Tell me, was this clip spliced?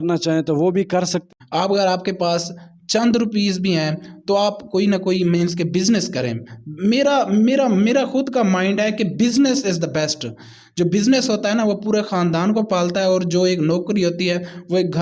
yes; 1 cut; at 1.2 s

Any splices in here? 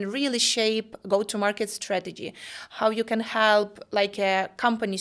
no; 0 cuts

